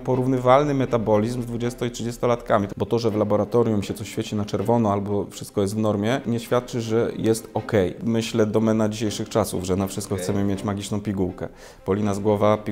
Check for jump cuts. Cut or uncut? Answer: cut